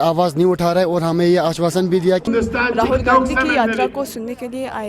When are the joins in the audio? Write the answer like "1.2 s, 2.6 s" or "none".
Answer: 2.3 s